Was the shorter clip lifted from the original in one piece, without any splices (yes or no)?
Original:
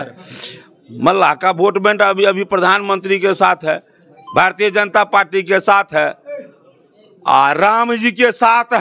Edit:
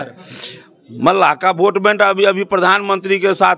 yes